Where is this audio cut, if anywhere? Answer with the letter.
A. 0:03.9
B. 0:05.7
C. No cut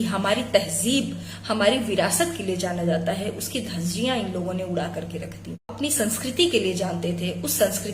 B